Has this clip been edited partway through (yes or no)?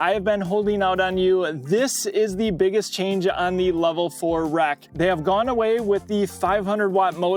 no